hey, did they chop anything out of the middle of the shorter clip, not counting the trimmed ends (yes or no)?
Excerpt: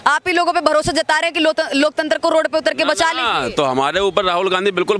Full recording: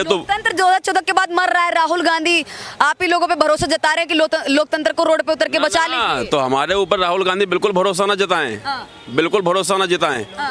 no